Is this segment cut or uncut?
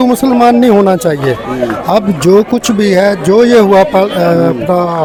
uncut